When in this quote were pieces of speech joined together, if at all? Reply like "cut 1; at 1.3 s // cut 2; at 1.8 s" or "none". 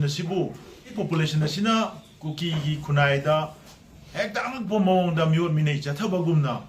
cut 1; at 0.9 s